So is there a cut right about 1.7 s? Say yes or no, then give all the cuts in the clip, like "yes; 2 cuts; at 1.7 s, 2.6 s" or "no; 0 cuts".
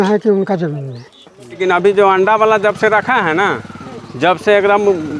yes; 1 cut; at 1.7 s